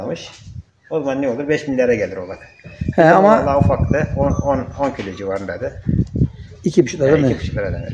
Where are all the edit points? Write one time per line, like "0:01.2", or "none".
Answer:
none